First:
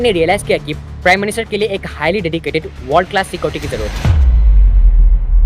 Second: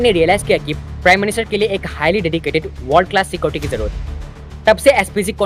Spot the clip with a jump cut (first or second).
first